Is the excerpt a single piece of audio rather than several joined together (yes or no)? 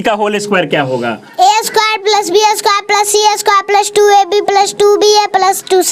yes